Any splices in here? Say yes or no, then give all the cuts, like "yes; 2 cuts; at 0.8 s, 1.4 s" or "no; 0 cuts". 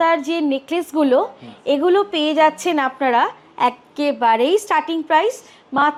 no; 0 cuts